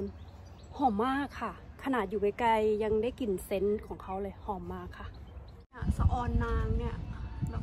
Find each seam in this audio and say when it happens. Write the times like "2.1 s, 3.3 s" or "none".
5.6 s